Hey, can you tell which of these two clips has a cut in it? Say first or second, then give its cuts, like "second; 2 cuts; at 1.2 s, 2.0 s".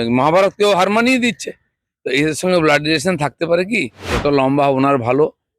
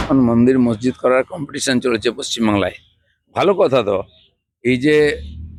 first; 1 cut; at 4.0 s